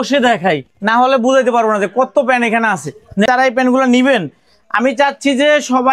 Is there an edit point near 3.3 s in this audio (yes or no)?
yes